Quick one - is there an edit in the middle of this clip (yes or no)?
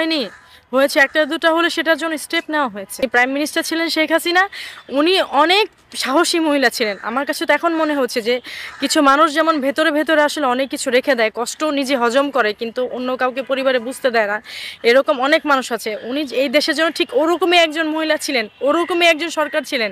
yes